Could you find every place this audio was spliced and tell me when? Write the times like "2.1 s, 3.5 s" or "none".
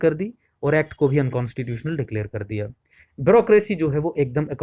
3.0 s